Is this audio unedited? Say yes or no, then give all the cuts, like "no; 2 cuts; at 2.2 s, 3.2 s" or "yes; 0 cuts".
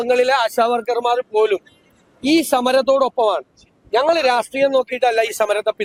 yes; 0 cuts